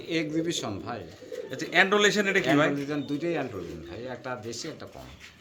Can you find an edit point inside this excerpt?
no; 0 cuts

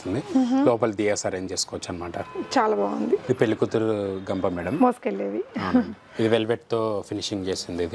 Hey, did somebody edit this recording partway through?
yes; 1 cut; at 3.2 s

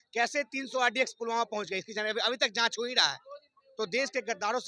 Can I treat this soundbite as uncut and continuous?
yes; 0 cuts

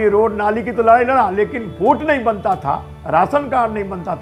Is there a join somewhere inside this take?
no; 0 cuts

